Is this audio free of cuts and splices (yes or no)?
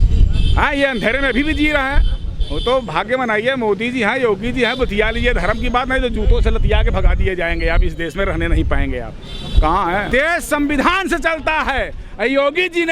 no